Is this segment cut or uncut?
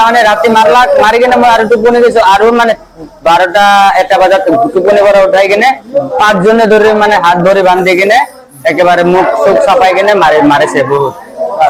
uncut